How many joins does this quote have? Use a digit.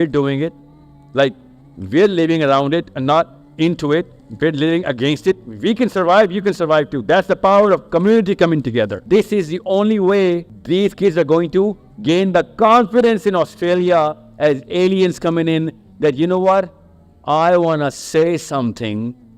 2